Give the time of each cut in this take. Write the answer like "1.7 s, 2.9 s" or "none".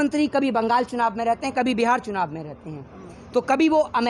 none